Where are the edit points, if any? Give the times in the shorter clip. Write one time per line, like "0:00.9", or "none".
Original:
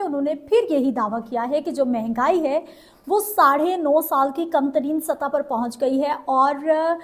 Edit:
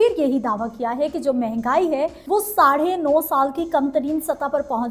0:02.2